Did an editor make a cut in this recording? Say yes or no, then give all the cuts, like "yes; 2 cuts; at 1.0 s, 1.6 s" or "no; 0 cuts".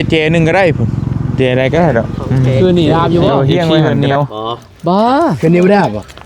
yes; 1 cut; at 3.9 s